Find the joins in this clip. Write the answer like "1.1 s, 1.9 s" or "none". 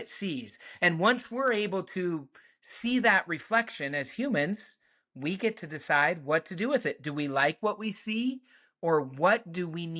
none

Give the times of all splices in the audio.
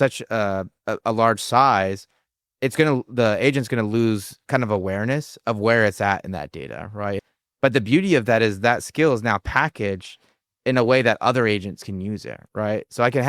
7.2 s

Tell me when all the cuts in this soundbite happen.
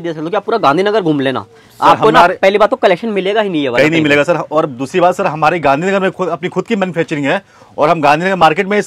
none

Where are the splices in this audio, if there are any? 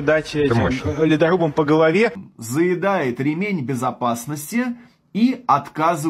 2.3 s

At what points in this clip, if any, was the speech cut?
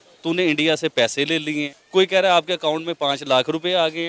1.8 s

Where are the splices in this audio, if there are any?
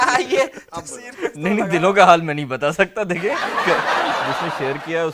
none

